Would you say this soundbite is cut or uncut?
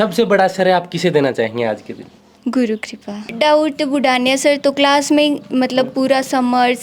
cut